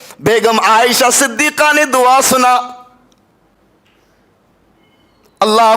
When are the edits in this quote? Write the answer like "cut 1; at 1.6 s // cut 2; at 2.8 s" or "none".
none